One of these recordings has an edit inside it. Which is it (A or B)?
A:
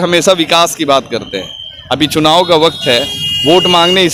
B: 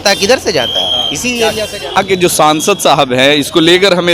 B